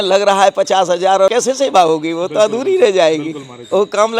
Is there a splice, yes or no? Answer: no